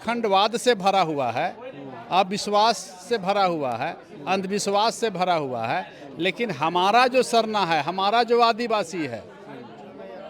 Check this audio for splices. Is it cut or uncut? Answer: uncut